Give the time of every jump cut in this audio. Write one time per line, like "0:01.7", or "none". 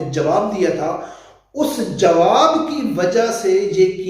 none